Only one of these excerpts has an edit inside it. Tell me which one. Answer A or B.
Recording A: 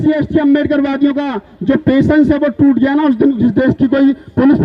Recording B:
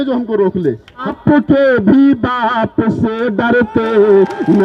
B